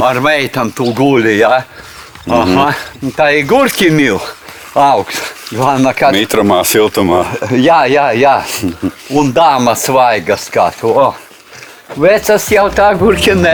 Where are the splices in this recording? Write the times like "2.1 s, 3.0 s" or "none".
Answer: none